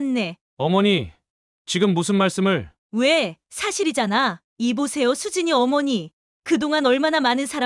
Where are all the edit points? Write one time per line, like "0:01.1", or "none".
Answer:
0:02.8